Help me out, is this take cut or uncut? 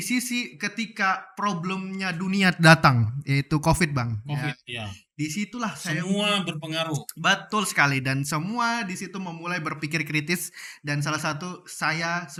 uncut